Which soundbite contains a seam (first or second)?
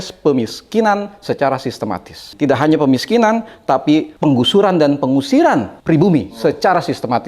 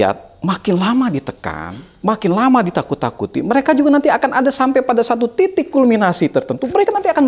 first